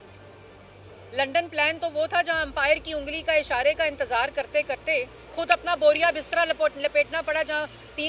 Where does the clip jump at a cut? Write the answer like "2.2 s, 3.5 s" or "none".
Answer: none